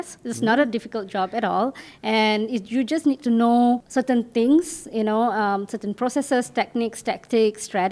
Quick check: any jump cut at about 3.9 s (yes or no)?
yes